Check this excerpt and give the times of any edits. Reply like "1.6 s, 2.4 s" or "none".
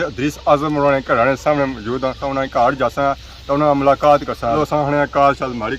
2.2 s, 4.6 s

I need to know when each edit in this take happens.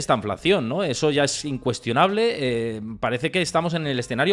none

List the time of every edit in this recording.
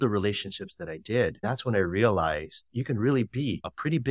1.4 s

